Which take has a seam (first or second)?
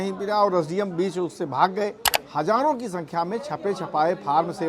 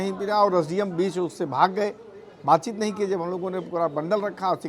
first